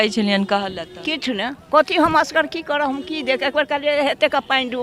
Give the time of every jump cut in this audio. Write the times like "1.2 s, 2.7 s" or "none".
none

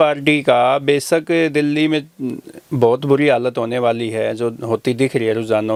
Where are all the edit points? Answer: none

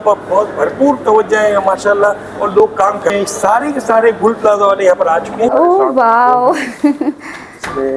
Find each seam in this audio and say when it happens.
3.1 s, 5.5 s

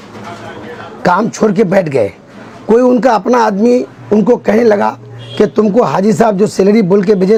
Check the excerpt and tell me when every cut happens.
none

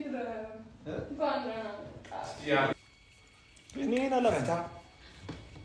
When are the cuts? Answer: 2.7 s

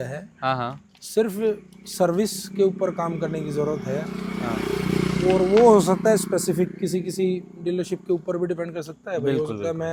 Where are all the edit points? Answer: none

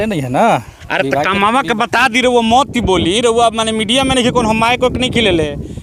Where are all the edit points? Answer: none

